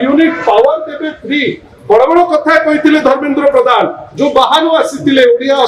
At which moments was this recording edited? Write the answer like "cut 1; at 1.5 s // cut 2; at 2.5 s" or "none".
none

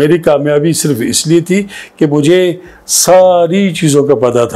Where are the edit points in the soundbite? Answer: none

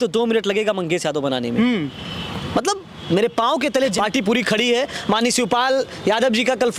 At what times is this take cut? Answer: cut 1; at 3.9 s

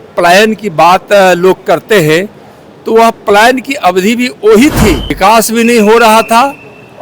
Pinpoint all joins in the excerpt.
cut 1; at 5.1 s

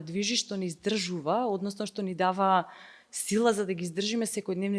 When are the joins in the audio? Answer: none

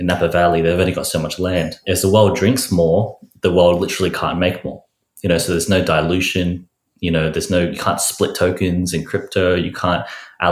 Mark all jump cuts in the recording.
cut 1; at 1.8 s

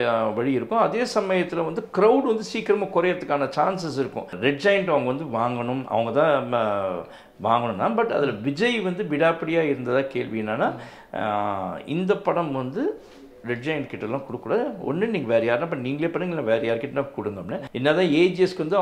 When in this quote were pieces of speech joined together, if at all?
cut 1; at 4.3 s // cut 2; at 17.6 s

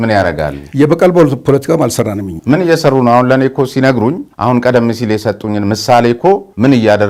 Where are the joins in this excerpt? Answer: none

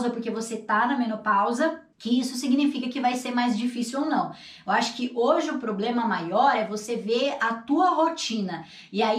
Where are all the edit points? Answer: cut 1; at 1.9 s

